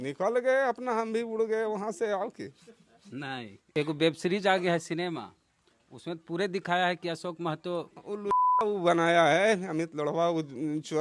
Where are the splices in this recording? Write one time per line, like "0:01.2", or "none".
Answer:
0:03.8
0:08.0